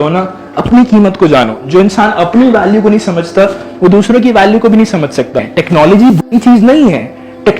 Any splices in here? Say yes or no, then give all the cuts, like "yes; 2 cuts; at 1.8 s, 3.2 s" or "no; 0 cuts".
yes; 1 cut; at 5.4 s